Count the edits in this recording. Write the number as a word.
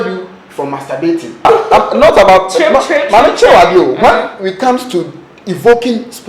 one